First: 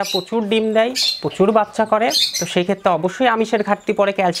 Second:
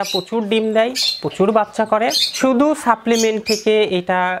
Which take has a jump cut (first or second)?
second